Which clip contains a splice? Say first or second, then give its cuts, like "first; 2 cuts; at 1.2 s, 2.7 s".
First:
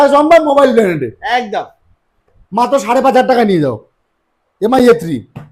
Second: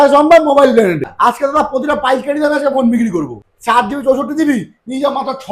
second; 2 cuts; at 1.1 s, 3.5 s